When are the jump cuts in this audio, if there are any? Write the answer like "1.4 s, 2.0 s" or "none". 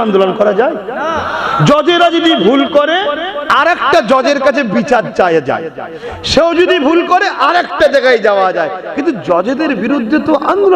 none